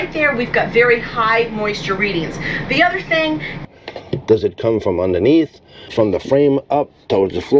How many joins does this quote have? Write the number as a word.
two